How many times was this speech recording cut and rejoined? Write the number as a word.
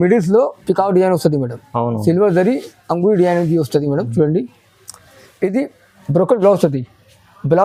zero